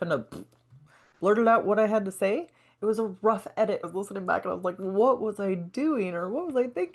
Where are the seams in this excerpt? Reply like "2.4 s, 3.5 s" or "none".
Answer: 2.7 s, 3.9 s